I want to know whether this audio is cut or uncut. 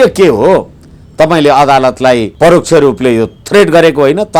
cut